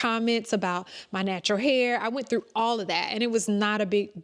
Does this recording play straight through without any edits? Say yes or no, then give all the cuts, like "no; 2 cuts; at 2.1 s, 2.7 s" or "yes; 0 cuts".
yes; 0 cuts